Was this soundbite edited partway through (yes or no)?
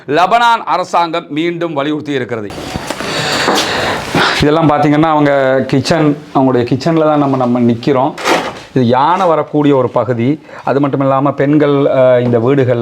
no